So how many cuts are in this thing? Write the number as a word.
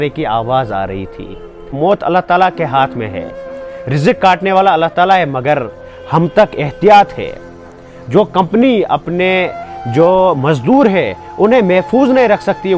one